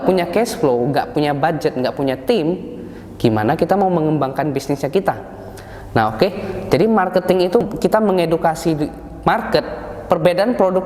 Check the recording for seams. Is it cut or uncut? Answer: cut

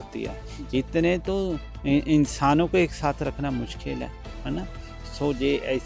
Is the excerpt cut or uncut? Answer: uncut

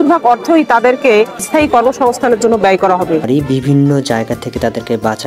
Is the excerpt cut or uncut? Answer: cut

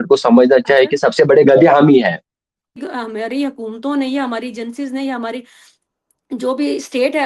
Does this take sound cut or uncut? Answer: cut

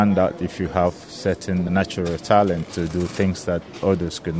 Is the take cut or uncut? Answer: cut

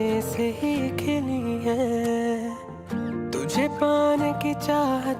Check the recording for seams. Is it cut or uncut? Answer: uncut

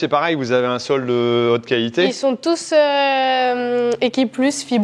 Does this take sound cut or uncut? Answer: uncut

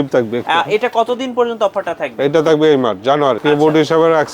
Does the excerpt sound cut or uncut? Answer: cut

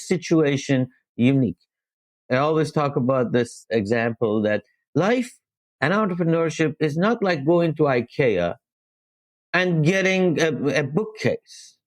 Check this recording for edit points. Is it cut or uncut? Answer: cut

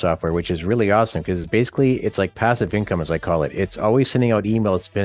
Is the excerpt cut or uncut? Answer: uncut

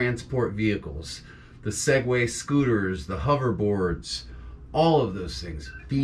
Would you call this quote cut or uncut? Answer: uncut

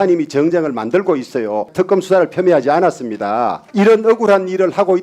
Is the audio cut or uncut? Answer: cut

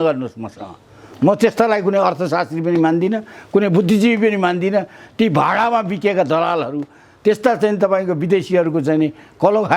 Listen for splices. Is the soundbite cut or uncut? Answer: uncut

